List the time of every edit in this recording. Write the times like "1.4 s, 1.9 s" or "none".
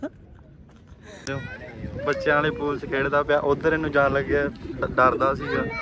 1.2 s